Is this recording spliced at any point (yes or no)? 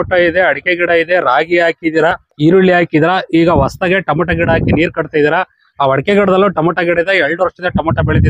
no